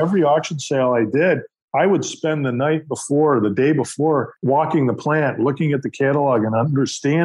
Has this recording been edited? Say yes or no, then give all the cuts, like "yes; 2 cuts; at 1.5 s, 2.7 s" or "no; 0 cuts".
yes; 1 cut; at 4.4 s